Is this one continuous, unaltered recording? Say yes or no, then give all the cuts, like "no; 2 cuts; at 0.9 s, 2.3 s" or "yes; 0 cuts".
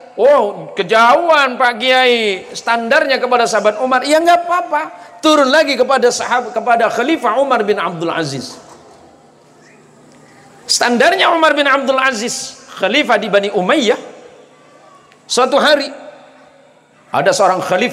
yes; 0 cuts